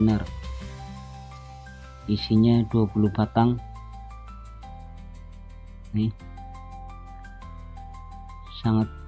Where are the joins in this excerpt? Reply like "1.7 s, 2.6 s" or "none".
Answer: 4.0 s, 5.7 s